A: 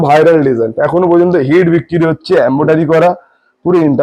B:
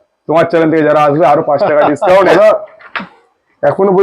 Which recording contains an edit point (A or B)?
B